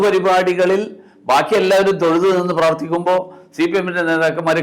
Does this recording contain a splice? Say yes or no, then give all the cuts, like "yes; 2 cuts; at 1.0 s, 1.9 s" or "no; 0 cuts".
no; 0 cuts